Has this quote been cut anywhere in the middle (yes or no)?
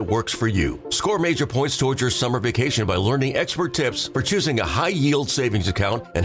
no